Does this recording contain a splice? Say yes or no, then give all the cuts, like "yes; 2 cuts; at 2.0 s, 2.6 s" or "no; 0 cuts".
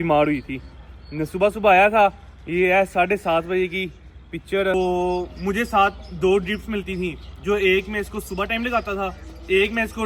yes; 1 cut; at 4.7 s